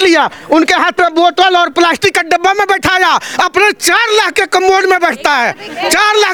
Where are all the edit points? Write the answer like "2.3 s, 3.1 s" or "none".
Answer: none